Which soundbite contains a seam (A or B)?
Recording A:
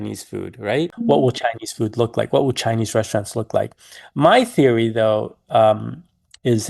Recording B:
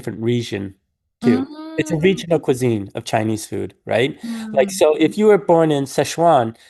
A